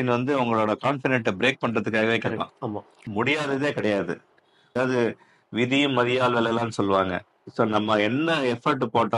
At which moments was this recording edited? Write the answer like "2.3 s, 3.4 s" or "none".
3.1 s, 4.7 s